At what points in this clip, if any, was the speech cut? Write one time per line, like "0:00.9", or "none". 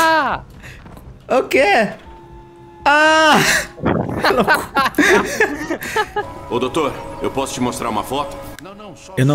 0:06.4